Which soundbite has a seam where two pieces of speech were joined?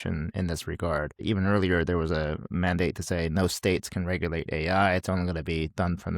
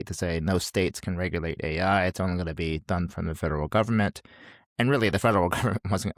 first; 1 cut; at 1.2 s

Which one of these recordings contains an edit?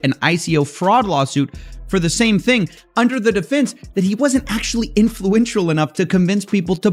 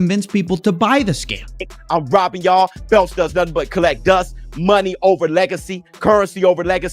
second; 1 cut; at 1.7 s

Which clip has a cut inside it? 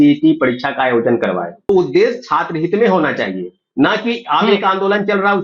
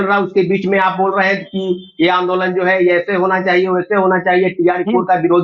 first; 1 cut; at 1.7 s

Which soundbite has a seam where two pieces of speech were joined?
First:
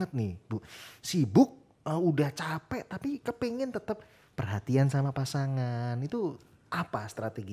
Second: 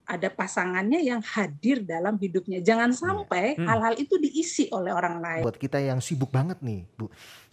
second; 1 cut; at 5.4 s

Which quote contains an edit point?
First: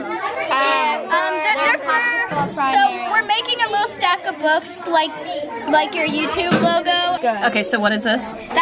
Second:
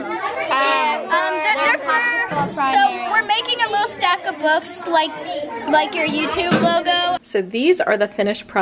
second; 1 cut; at 7.2 s

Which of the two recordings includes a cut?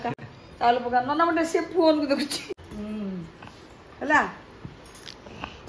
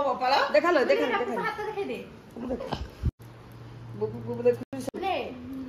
second; 1 cut; at 2.9 s

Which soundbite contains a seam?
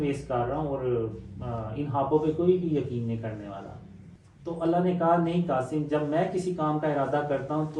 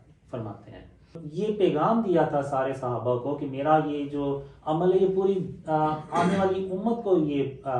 second; 1 cut; at 1.2 s

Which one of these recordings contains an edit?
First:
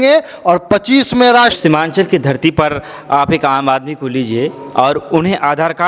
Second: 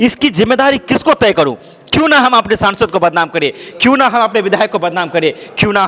first; 1 cut; at 1.6 s

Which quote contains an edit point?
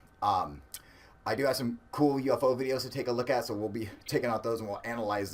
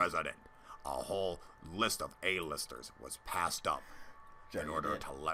first; 1 cut; at 3.4 s

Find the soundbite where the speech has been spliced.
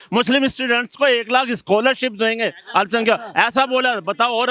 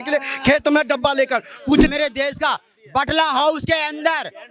second; 1 cut; at 1.9 s

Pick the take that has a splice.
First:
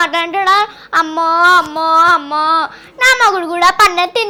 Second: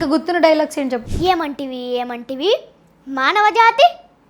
second; 1 cut; at 1.1 s

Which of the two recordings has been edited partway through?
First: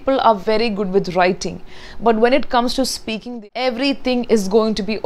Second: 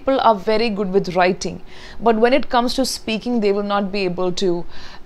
first; 1 cut; at 3.3 s

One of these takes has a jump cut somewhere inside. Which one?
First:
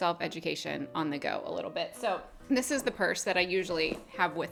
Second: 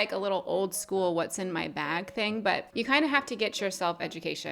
second; 1 cut; at 2.7 s

